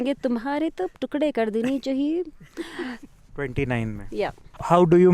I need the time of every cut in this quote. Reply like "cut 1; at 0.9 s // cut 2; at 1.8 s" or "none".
cut 1; at 2.9 s